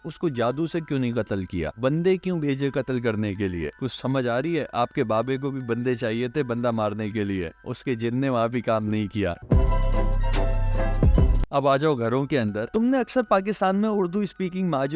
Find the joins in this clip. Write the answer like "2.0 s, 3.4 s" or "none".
none